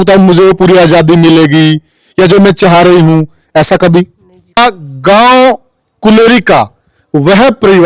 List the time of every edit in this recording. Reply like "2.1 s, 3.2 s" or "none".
4.6 s